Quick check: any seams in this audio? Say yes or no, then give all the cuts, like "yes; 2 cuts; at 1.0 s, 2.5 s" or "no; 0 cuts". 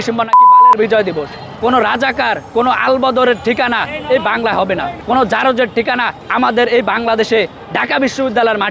yes; 4 cuts; at 1.4 s, 2.4 s, 4.9 s, 6.2 s